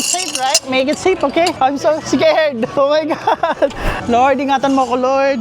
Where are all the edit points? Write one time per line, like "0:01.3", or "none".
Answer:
0:04.0